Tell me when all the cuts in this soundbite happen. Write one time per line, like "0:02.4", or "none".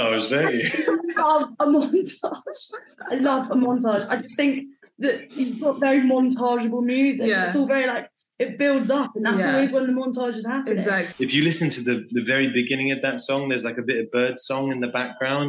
0:11.1